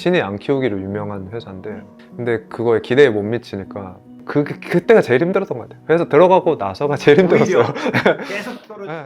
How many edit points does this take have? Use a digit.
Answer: 2